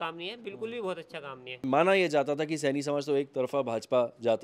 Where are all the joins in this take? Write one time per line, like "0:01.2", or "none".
0:01.6